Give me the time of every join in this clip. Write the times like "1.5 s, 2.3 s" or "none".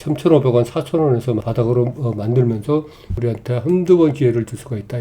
1.4 s, 3.2 s